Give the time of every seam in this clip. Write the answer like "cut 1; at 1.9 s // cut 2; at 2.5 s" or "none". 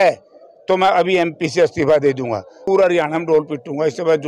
cut 1; at 2.6 s